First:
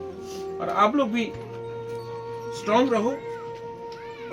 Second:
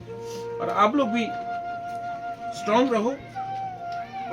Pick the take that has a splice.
first; 2 cuts; at 1.3 s, 2.6 s

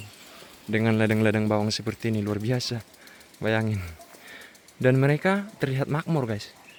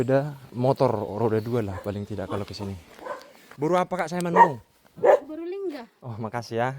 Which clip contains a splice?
second; 1 cut; at 3.5 s

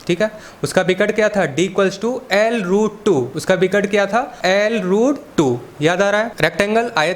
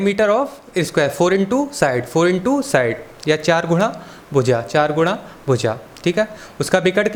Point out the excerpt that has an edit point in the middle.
first; 4 cuts; at 3.3 s, 4.3 s, 5.2 s, 6.3 s

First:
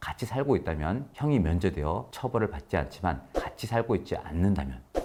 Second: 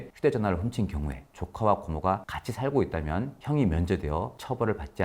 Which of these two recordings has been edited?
second; 1 cut; at 1.2 s

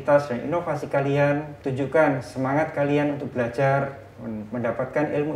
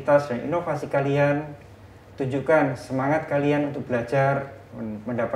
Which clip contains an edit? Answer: first; 1 cut; at 1.6 s

